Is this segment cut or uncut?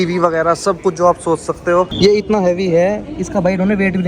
cut